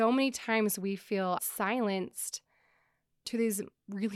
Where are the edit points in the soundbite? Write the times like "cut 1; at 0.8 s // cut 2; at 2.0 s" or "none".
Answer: cut 1; at 1.4 s